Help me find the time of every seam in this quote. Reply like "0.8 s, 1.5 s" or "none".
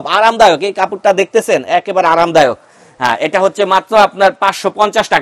none